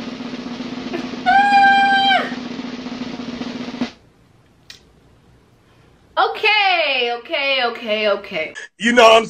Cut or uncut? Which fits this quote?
cut